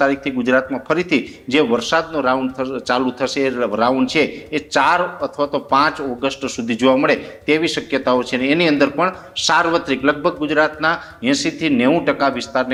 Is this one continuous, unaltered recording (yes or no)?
yes